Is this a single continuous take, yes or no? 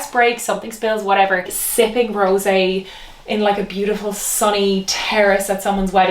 no